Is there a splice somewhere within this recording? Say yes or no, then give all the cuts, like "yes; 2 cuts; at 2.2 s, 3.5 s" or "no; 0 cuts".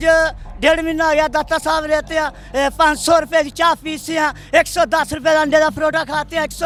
no; 0 cuts